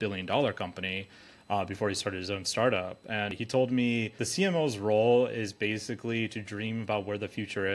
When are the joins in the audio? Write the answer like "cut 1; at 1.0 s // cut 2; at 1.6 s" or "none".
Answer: cut 1; at 3.3 s // cut 2; at 4.2 s